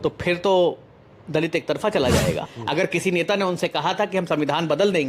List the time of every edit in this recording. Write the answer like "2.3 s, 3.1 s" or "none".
2.5 s